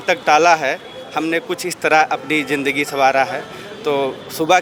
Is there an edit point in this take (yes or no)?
no